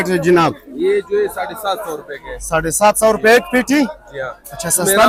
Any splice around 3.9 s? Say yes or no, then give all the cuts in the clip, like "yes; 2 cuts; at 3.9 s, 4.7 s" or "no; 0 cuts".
no; 0 cuts